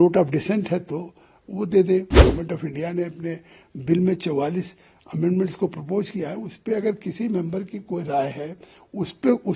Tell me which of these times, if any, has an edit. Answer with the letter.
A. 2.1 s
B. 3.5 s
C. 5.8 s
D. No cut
A